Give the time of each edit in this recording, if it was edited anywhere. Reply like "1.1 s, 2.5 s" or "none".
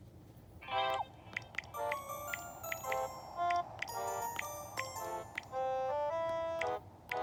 none